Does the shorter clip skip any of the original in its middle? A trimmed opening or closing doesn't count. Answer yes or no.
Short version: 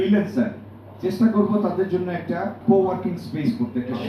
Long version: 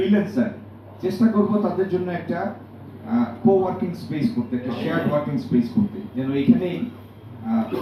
yes